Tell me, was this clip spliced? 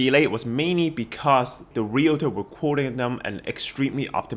yes; 1 cut; at 1.6 s

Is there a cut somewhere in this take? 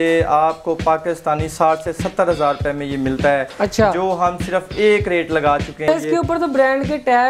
yes; 1 cut; at 5.9 s

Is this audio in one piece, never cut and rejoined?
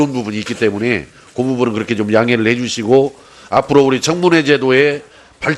yes; 0 cuts

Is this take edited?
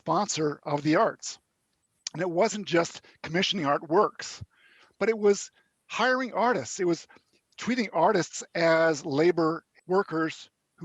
yes; 1 cut; at 9.7 s

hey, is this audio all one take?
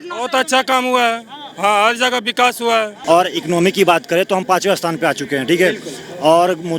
no; 1 cut; at 2.9 s

